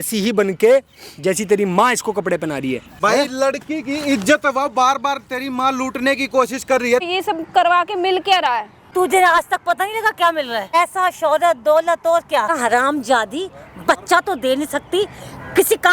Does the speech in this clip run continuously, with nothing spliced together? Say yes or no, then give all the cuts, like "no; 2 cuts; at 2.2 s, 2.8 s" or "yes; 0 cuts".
no; 5 cuts; at 2.9 s, 7.1 s, 8.8 s, 10.7 s, 12.6 s